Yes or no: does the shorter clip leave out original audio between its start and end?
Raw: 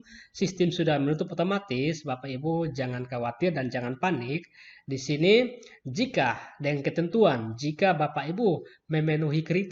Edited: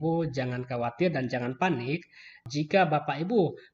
yes